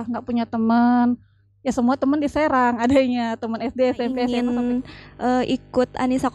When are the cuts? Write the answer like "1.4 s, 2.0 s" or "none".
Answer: 4.3 s